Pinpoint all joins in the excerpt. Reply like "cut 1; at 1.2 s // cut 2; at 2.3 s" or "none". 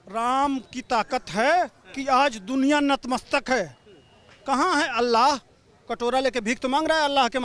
none